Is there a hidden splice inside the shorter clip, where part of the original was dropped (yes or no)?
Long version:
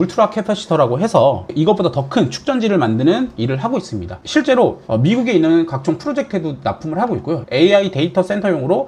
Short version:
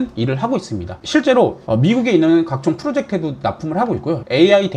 no